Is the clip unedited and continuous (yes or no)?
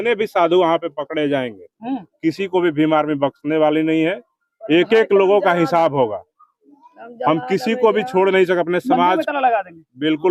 yes